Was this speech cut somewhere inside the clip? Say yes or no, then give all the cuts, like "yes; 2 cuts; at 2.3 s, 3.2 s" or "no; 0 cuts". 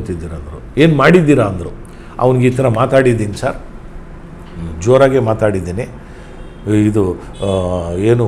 no; 0 cuts